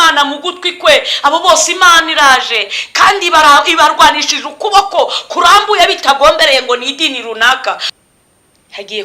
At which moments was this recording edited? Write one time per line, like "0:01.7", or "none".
0:07.9